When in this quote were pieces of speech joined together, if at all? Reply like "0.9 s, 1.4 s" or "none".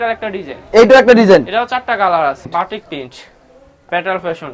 2.6 s